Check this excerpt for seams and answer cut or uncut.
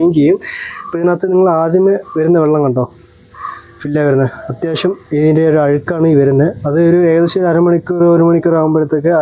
uncut